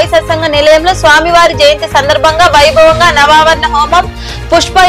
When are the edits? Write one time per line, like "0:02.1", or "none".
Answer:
none